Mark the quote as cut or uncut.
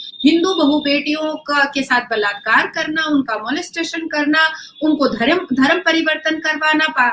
uncut